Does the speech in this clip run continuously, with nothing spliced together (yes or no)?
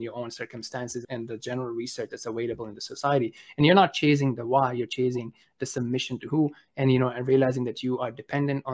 no